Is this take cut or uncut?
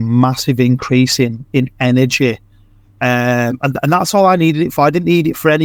uncut